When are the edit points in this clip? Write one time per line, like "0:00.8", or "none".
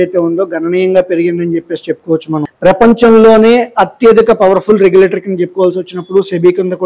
0:02.4

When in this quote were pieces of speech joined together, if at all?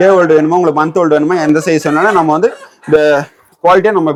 none

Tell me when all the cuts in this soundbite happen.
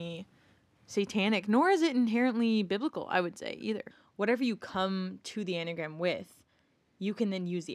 0:04.0

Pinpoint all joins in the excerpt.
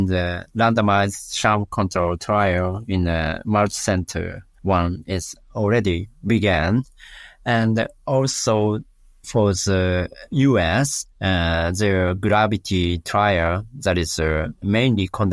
0:04.4
0:10.2

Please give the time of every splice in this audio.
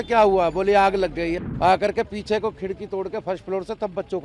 0:01.4

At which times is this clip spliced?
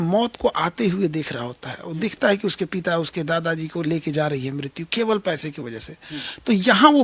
none

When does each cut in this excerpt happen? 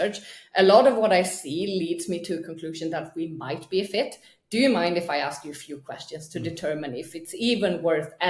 none

